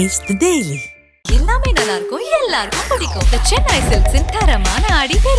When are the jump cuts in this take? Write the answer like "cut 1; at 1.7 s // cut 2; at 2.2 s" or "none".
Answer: none